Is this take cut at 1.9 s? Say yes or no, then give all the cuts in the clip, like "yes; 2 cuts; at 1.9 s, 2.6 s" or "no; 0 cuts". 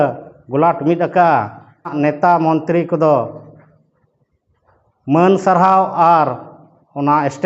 yes; 1 cut; at 1.9 s